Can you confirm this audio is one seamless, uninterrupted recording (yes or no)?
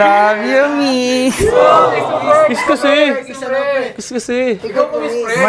yes